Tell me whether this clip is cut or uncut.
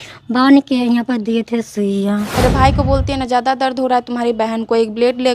cut